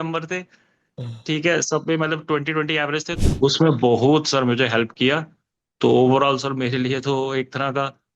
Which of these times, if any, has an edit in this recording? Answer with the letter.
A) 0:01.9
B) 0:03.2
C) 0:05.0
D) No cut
B